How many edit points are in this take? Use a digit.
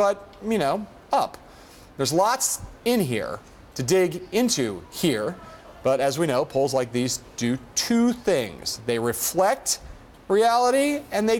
1